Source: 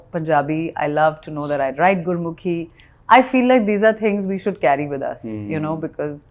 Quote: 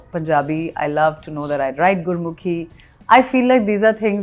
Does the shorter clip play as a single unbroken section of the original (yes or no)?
yes